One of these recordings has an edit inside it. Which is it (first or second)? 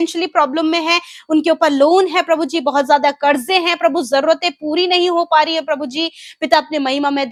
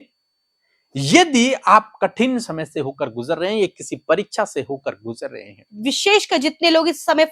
second